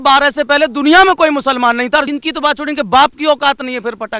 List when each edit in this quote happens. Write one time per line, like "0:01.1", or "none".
0:02.1

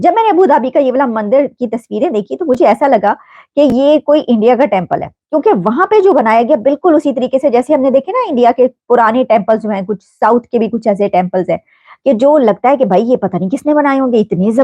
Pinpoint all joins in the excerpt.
none

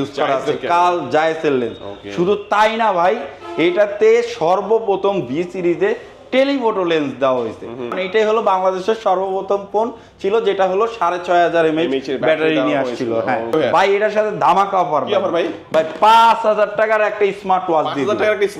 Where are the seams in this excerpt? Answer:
0:08.0
0:13.5

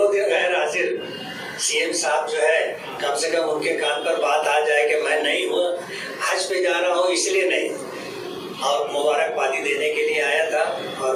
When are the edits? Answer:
none

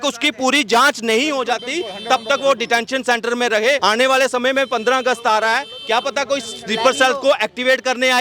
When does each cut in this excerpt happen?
0:03.8

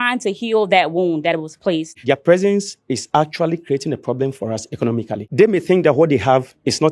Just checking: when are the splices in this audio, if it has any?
0:02.0
0:05.2

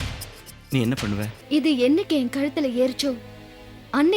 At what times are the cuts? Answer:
0:01.4

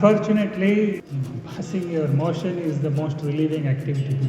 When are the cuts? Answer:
0:01.1

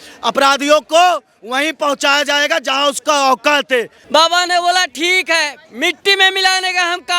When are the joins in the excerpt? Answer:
0:04.0

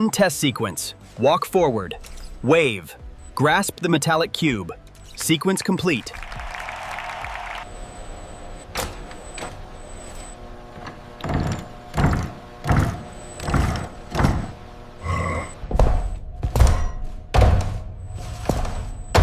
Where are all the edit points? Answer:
0:07.5
0:15.6

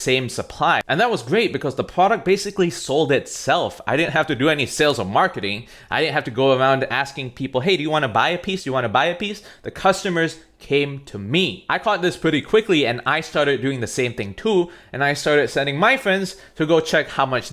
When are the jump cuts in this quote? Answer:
0:00.8
0:11.6

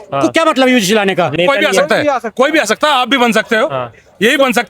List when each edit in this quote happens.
0:01.3

